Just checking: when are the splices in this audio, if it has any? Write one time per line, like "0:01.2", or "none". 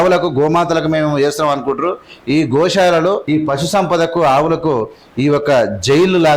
0:03.2